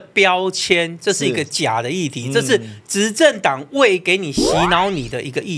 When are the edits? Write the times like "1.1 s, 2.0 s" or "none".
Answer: none